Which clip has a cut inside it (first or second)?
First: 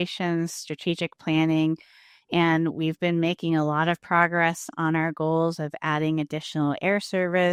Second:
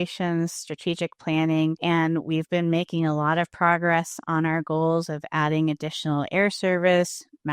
second